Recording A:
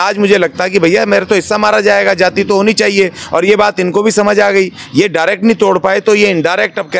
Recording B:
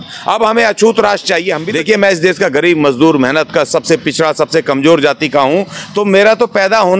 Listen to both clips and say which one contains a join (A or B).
B